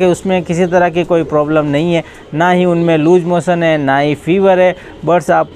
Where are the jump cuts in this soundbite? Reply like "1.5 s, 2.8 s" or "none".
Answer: none